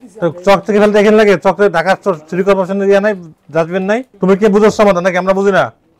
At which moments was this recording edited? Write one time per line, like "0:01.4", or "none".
0:04.1